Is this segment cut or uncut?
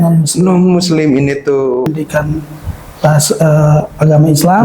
cut